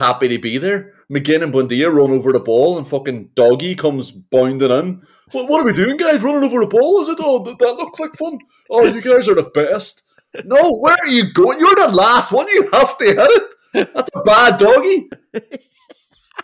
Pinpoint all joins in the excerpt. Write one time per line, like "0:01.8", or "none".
0:15.2

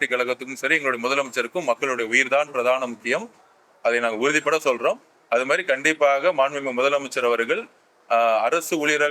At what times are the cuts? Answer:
none

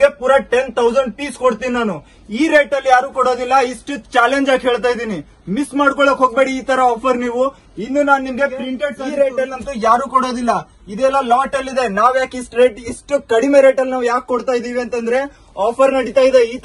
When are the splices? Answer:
0:08.9

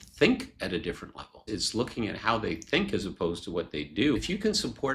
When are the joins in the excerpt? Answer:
0:01.4
0:04.2

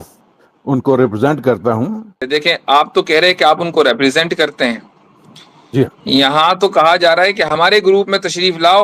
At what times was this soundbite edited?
0:02.2

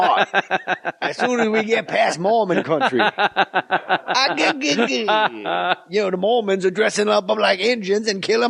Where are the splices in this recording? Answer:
0:03.8

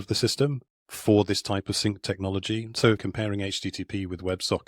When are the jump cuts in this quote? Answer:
0:03.0

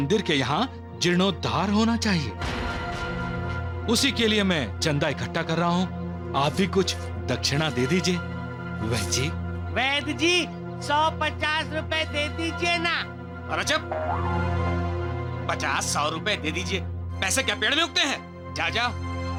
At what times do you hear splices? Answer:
none

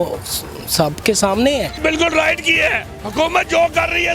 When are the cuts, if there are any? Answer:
0:01.8

